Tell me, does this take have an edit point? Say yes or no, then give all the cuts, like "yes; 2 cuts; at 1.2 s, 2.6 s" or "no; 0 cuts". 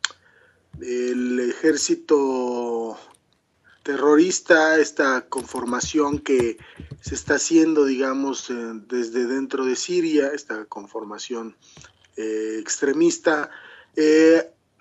yes; 1 cut; at 6.2 s